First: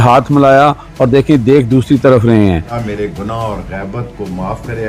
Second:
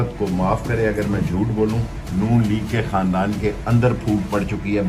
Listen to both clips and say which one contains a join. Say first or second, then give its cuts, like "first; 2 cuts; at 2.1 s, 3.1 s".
first; 1 cut; at 2.8 s